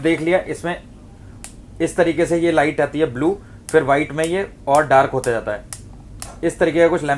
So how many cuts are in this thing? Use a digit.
0